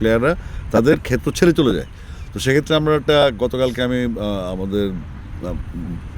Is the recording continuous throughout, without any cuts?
yes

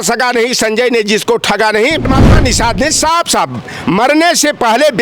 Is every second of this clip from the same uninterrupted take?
no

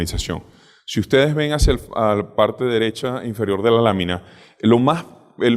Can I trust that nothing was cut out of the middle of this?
yes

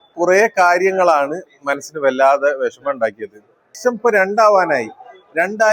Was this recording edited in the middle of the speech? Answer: yes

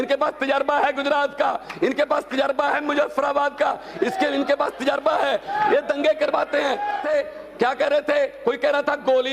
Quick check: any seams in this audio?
yes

